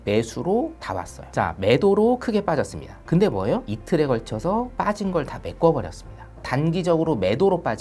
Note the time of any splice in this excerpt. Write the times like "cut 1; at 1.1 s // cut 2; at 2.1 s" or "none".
cut 1; at 6.4 s